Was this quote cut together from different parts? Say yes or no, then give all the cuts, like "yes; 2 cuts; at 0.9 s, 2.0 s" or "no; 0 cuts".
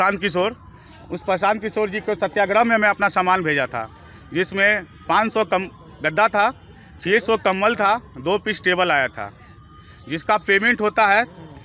no; 0 cuts